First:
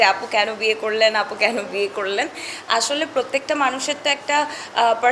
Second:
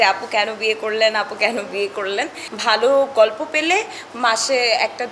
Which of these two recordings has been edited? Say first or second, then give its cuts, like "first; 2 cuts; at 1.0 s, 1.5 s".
second; 1 cut; at 2.4 s